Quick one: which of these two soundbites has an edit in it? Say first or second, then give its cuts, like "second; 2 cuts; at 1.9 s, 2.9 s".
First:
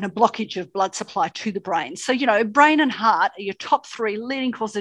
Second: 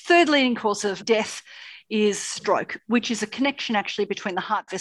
second; 1 cut; at 1.0 s